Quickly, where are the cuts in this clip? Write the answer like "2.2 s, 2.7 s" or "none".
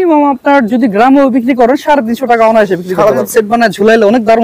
3.2 s

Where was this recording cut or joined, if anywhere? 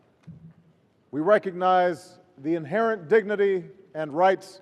3.0 s

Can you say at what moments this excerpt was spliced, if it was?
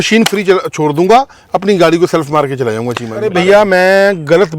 3.3 s

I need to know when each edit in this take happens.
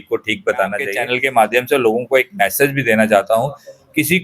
0.9 s

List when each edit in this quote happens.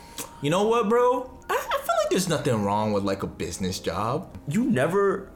1.3 s, 4.4 s

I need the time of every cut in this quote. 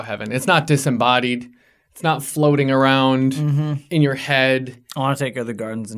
4.8 s

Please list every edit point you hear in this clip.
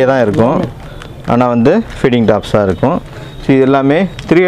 none

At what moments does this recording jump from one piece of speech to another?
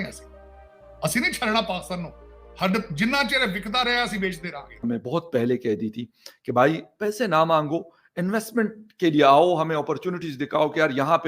4.8 s

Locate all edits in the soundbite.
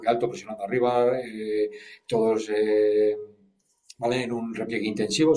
none

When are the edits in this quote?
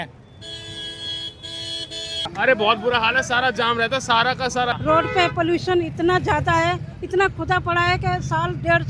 2.2 s, 4.8 s

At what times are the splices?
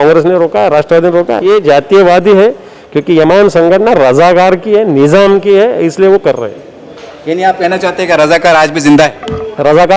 1.4 s

